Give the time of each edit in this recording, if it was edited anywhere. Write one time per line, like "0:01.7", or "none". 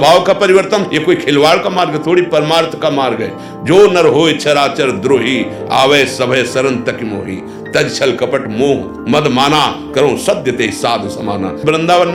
none